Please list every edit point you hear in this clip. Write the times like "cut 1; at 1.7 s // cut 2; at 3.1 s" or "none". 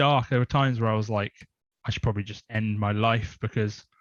none